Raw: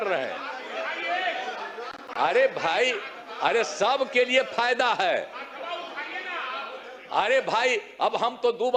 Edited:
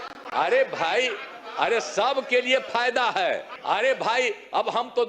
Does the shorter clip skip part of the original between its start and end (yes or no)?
yes